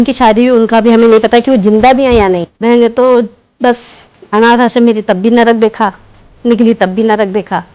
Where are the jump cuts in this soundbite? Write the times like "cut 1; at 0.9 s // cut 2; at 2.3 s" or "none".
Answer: cut 1; at 2.5 s